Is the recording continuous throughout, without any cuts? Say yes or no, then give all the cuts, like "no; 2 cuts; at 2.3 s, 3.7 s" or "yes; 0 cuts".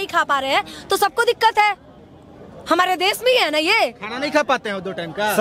yes; 0 cuts